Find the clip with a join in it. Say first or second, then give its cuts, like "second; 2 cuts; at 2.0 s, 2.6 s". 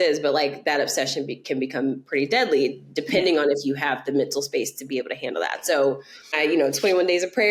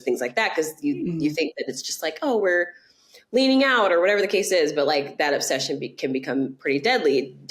first; 1 cut; at 6.4 s